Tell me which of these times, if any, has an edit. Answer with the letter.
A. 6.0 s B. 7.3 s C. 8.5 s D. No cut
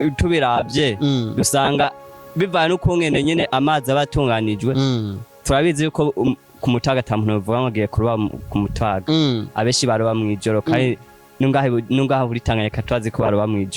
D